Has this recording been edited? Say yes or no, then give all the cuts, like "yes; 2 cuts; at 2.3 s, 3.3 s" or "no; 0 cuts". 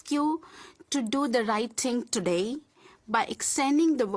no; 0 cuts